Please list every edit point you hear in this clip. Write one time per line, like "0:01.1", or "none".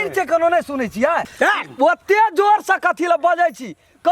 0:01.2